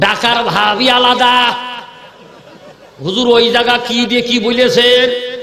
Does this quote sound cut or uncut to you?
uncut